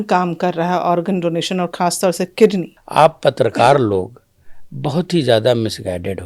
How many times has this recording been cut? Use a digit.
1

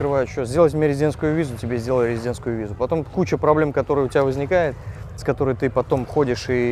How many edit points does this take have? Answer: 0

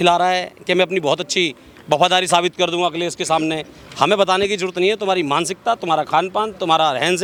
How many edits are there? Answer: 0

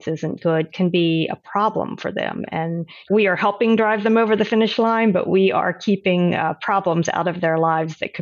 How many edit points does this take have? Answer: 1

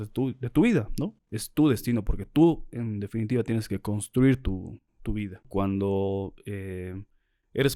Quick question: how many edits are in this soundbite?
1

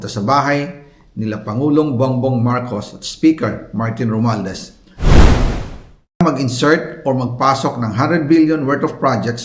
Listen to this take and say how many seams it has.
1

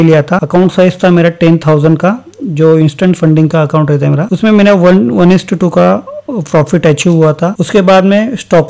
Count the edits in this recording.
0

